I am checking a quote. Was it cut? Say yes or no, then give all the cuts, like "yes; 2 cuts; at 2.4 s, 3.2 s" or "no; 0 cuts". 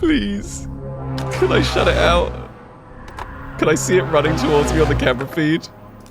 yes; 1 cut; at 3.3 s